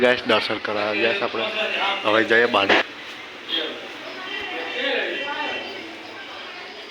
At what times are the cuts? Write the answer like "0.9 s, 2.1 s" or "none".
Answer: 2.8 s